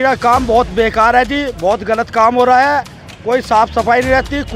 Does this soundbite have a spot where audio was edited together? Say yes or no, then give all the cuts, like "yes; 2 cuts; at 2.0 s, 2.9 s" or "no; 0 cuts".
no; 0 cuts